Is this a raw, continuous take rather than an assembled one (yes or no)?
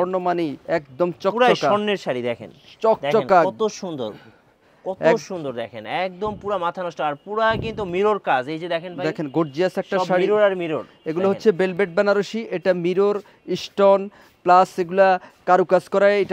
yes